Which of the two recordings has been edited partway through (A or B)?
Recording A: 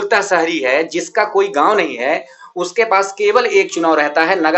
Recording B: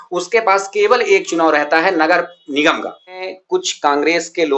B